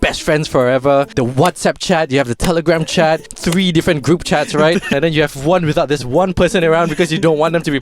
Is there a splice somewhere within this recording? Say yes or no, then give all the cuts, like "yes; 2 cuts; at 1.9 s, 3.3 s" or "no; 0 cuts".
yes; 3 cuts; at 1.1 s, 3.3 s, 4.9 s